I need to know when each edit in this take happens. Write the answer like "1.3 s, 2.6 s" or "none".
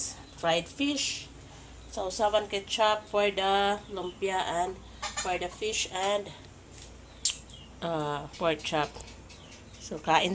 8.3 s